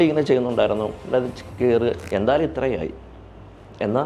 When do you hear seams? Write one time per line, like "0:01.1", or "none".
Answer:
0:02.0